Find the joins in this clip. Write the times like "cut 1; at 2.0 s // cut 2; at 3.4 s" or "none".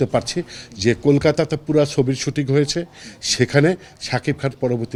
none